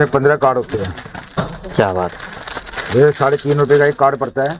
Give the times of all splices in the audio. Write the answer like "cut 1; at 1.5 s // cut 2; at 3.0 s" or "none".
none